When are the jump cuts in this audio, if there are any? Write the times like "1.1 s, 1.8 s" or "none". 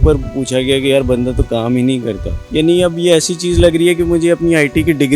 2.3 s